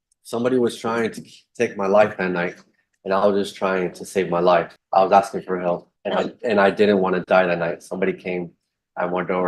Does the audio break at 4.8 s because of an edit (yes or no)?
yes